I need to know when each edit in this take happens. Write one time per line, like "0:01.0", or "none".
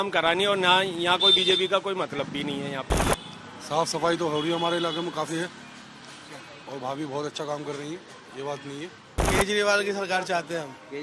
0:03.0
0:09.2